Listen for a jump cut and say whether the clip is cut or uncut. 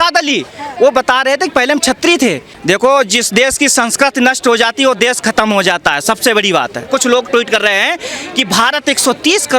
cut